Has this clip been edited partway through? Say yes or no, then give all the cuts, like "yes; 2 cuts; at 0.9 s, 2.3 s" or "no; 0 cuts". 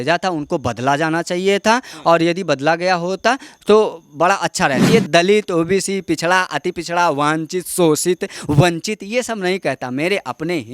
yes; 1 cut; at 4.9 s